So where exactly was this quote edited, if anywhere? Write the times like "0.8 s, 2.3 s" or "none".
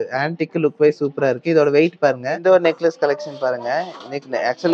2.3 s